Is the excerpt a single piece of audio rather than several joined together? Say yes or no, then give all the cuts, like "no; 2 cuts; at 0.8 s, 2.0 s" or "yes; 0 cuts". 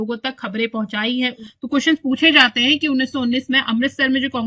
no; 1 cut; at 1.4 s